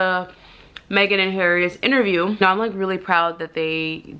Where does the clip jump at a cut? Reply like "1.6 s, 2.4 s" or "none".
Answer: 2.4 s